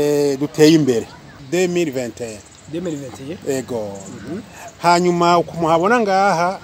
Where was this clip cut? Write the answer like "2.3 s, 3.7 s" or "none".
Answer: 1.4 s